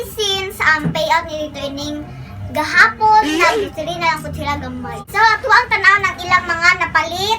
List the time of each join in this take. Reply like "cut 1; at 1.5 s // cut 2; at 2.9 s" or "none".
cut 1; at 5.0 s

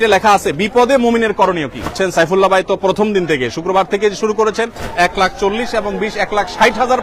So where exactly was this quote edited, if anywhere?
cut 1; at 1.9 s // cut 2; at 4.8 s

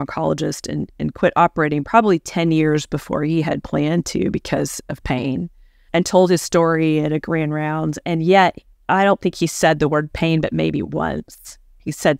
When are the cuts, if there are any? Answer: none

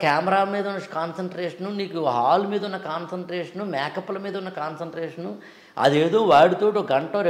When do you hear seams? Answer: none

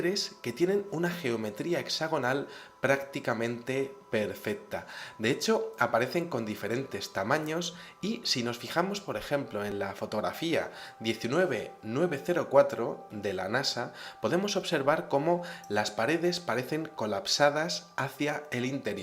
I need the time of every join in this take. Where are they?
cut 1; at 3.1 s

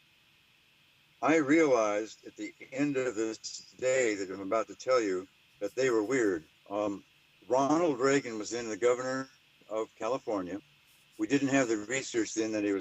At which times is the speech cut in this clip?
cut 1; at 8.8 s

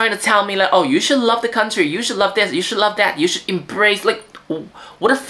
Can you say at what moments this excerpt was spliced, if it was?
none

